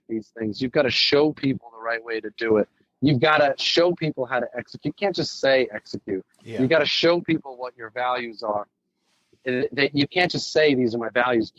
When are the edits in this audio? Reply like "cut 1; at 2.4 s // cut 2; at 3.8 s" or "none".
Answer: none